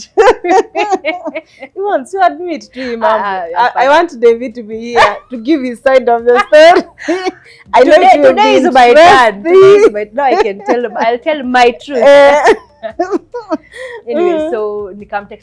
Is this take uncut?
yes; 0 cuts

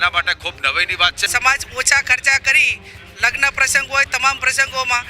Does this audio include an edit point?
yes; 1 cut; at 1.2 s

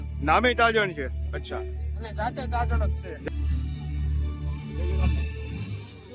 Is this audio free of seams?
no; 1 cut; at 3.1 s

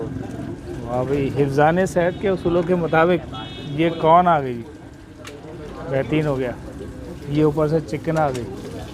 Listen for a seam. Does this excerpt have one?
no; 0 cuts

